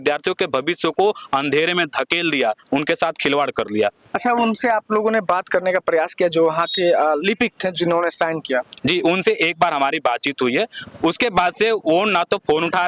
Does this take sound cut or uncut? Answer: uncut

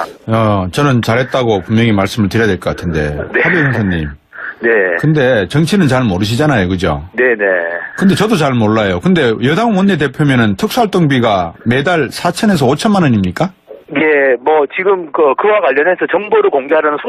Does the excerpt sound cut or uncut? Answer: uncut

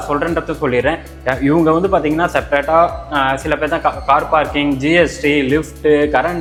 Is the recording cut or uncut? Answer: uncut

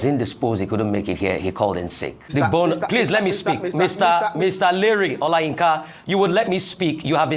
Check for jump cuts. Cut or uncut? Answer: cut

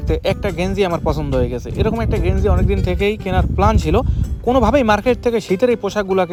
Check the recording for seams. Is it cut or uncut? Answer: uncut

